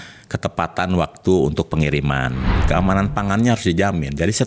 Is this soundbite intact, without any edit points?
no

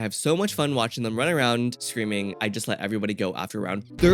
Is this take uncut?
no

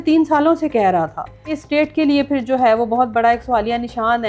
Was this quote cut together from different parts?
yes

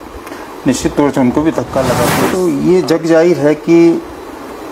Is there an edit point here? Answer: yes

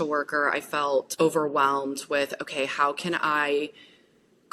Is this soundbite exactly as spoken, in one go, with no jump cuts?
yes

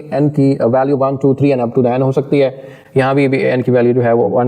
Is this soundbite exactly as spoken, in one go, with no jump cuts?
yes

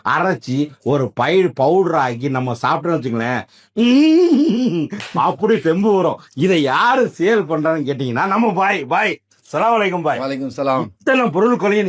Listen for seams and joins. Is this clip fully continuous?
yes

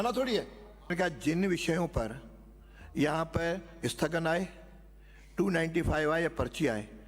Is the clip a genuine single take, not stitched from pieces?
no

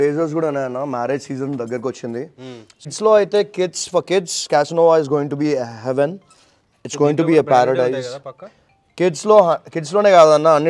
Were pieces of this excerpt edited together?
yes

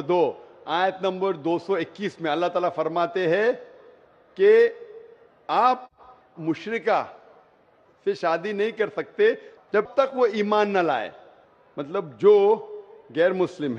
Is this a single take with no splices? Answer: no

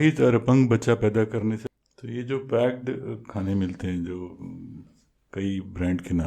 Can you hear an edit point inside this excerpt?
yes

